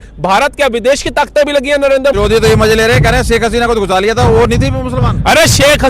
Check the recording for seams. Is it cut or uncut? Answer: cut